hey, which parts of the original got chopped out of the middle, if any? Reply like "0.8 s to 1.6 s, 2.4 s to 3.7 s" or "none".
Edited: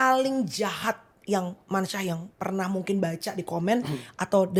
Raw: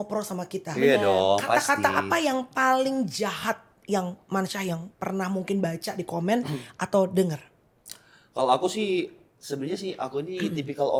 none